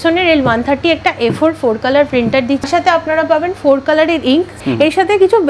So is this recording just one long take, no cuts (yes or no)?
no